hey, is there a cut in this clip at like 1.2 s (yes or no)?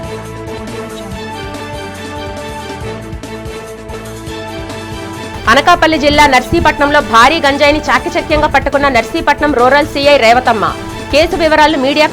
no